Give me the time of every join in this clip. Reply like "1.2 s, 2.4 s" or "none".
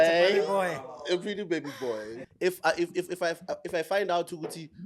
2.2 s